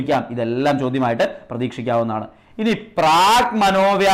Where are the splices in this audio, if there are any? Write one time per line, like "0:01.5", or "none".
none